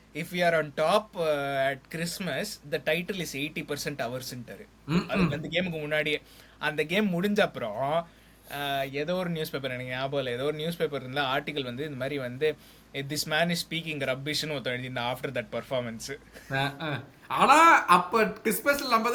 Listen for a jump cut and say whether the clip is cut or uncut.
uncut